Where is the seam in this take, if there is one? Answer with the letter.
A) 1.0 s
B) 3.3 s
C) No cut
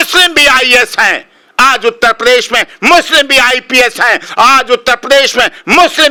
C